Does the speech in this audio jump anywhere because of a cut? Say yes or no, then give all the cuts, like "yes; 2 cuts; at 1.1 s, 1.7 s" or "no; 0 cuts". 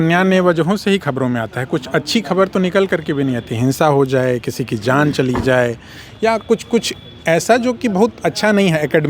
no; 0 cuts